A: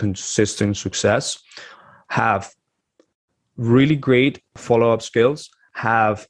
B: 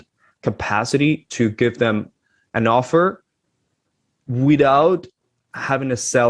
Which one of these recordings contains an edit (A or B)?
A